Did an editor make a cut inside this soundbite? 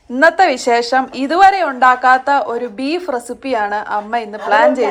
no; 0 cuts

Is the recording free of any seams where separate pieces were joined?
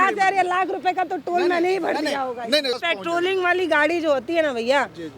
no; 1 cut; at 2.7 s

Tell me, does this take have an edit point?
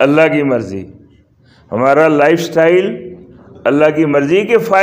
no; 0 cuts

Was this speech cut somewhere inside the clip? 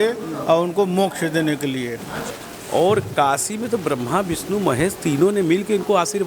yes; 1 cut; at 2.3 s

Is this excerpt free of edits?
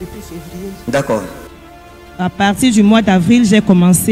yes; 0 cuts

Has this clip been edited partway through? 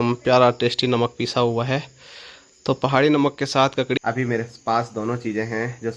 yes; 1 cut; at 4.0 s

